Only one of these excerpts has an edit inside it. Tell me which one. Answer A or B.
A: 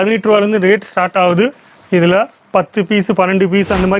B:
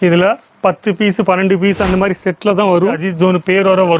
B